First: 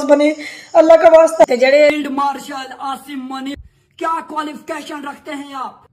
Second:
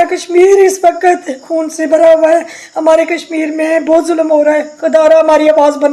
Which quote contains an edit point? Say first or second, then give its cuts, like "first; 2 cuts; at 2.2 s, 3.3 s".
first; 1 cut; at 1.9 s